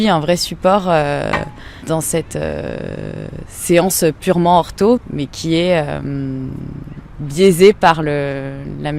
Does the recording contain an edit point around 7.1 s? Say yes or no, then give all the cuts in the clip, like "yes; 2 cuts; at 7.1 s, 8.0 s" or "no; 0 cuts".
no; 2 cuts; at 1.8 s, 5.0 s